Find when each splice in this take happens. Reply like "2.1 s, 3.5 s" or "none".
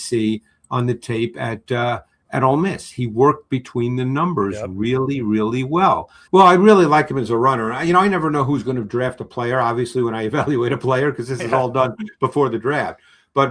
6.1 s